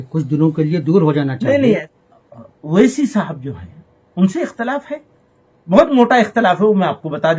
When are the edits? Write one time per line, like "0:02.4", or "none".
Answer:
0:01.9
0:06.5